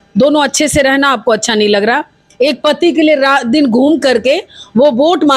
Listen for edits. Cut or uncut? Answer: uncut